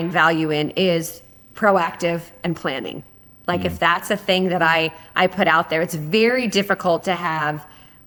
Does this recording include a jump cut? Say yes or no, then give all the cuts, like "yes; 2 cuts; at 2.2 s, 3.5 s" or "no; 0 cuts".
no; 0 cuts